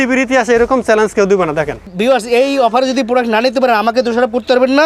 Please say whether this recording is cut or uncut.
cut